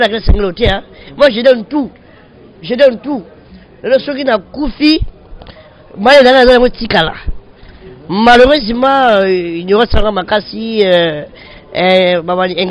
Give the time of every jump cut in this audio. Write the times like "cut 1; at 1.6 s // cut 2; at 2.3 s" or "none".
none